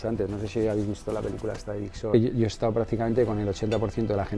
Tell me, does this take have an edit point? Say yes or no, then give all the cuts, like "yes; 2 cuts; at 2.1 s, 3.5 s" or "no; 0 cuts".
yes; 1 cut; at 2.1 s